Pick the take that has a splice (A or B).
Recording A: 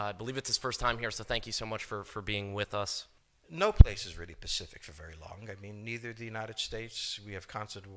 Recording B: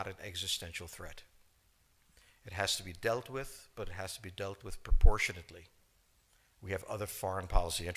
A